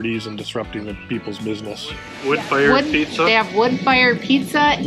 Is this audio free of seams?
no; 1 cut; at 2.1 s

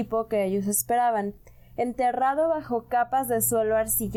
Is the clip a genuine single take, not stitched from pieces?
yes; 0 cuts

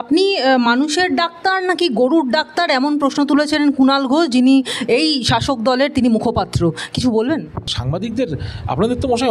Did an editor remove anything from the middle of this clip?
yes; 1 cut; at 7.7 s

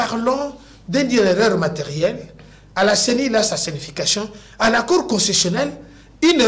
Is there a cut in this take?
no; 0 cuts

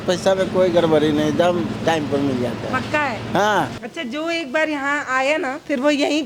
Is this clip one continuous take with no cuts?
no; 1 cut; at 3.8 s

